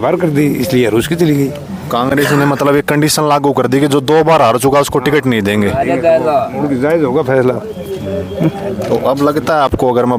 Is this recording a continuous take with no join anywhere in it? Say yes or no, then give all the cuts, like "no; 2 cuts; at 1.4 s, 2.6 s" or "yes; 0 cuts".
yes; 0 cuts